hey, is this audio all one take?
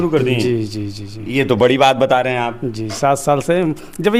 yes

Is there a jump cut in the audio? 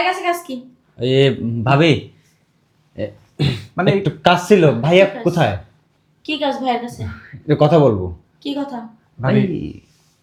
no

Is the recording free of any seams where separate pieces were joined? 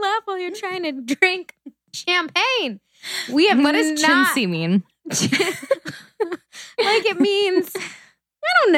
no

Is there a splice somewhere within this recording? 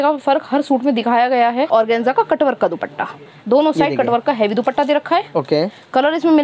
yes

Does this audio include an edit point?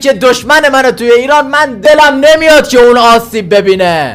yes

